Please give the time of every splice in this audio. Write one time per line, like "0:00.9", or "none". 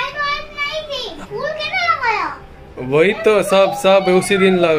0:01.2